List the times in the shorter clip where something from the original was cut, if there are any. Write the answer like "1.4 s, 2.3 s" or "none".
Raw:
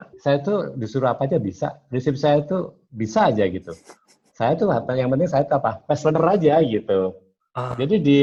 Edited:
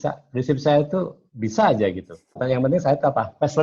2.4 s

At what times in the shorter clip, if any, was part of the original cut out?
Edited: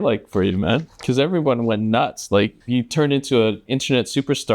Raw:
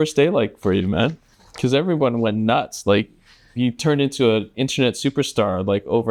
0.9 s, 2.6 s

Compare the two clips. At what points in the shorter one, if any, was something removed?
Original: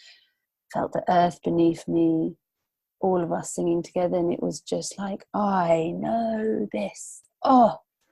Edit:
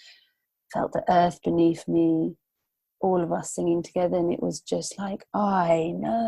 none

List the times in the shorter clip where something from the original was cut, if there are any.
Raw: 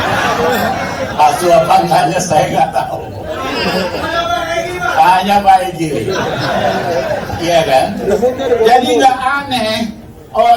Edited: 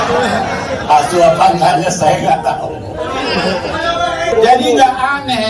4.3 s

